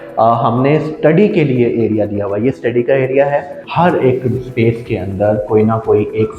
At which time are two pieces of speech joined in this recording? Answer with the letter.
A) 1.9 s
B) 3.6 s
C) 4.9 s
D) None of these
B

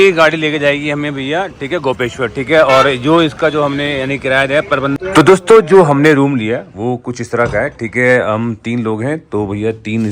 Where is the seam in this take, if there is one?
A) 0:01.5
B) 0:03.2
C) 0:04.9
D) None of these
C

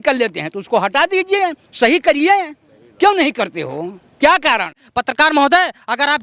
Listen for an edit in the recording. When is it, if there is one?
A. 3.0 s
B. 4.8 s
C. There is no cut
B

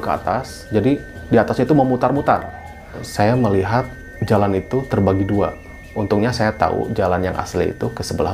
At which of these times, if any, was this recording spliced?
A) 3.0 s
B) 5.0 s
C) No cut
A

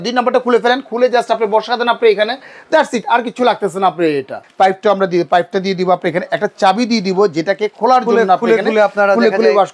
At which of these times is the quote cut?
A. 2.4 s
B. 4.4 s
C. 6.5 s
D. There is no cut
B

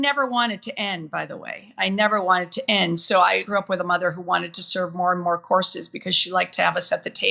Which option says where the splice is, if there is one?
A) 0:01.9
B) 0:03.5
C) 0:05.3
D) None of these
B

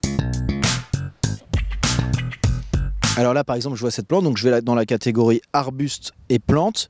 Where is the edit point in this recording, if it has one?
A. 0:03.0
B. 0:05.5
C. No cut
B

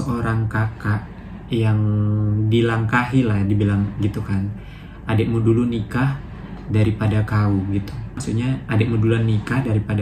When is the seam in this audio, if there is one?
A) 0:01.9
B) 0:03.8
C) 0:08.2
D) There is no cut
C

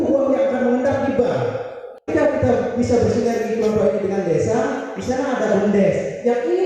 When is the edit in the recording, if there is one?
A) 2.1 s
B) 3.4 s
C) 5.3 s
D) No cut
A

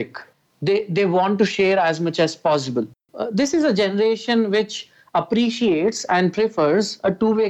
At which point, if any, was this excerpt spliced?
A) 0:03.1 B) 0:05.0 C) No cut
A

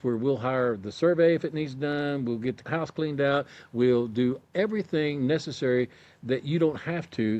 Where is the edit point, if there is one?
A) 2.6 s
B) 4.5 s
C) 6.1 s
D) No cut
A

